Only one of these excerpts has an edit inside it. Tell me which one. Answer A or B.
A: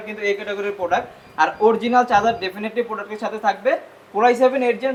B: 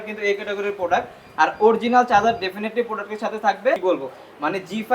B